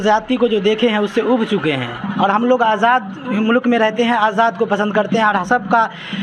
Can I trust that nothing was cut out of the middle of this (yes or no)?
yes